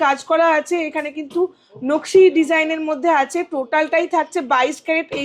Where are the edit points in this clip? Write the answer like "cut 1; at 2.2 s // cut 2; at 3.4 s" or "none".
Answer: none

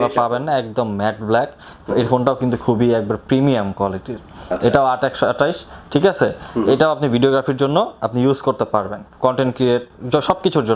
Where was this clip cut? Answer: none

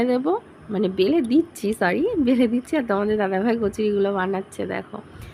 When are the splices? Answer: none

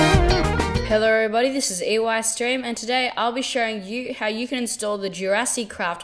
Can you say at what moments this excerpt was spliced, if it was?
none

